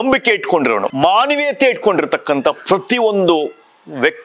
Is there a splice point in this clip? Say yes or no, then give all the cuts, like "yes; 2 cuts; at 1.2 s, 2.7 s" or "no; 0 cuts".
yes; 1 cut; at 0.9 s